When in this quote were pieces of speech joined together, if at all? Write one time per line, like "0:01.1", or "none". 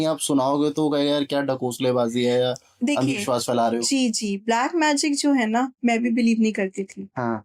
none